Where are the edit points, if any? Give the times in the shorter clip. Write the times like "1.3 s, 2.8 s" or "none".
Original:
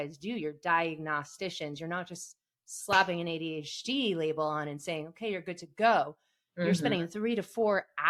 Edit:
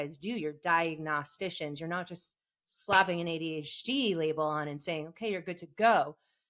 none